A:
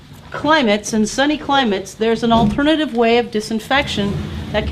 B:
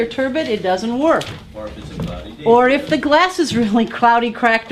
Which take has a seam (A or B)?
A